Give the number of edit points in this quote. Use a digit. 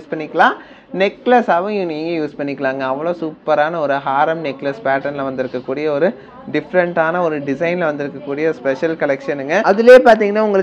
1